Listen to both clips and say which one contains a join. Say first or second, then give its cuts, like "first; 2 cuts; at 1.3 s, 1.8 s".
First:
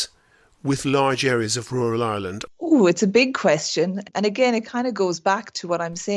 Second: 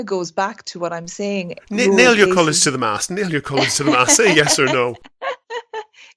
first; 1 cut; at 2.4 s